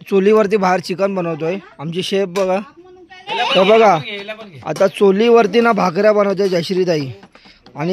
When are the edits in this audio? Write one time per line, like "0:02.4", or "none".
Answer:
0:03.2